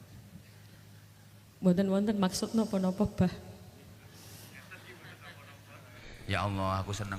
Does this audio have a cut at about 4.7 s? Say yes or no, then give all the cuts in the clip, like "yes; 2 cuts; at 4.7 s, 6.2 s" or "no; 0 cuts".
no; 1 cut; at 6.1 s